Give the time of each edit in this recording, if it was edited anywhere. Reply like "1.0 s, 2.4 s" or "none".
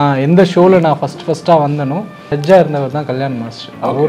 2.3 s